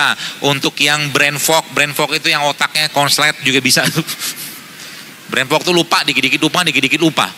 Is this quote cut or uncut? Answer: uncut